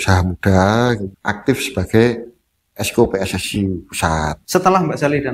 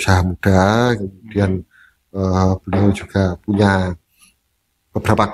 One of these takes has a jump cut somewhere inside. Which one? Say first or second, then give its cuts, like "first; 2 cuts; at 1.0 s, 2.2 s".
first; 2 cuts; at 1.1 s, 4.4 s